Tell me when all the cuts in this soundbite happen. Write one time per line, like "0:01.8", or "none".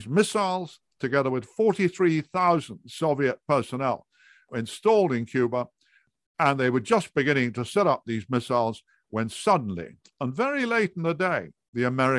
0:04.5
0:06.1

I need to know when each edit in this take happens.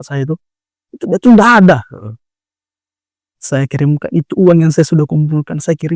none

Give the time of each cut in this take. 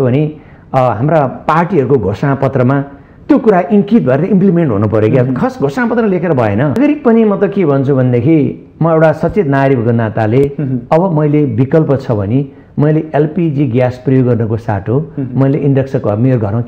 0:06.8

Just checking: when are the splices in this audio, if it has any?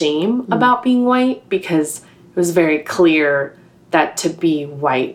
none

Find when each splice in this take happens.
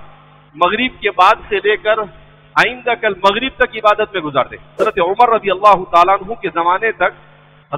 0:04.8

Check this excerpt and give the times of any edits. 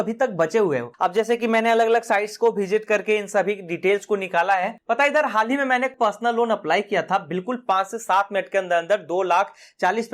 0:00.9
0:04.8
0:05.9

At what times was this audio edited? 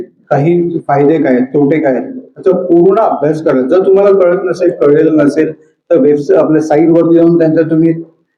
none

